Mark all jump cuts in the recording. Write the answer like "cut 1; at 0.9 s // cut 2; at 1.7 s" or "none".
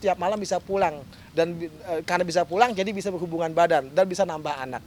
none